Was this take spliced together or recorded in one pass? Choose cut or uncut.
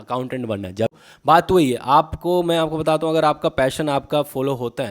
cut